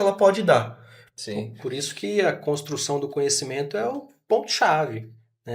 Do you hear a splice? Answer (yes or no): yes